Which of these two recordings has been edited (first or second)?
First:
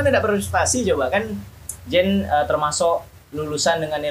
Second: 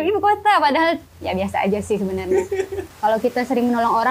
second